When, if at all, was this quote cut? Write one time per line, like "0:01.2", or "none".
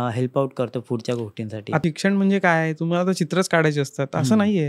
0:01.8